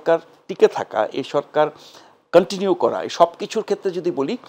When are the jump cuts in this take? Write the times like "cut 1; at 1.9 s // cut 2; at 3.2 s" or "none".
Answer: none